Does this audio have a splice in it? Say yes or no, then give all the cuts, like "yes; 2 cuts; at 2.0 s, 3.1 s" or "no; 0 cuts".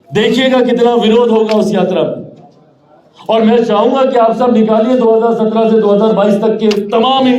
no; 0 cuts